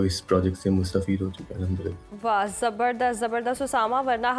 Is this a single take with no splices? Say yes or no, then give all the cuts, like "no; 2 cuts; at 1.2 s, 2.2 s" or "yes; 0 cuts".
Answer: yes; 0 cuts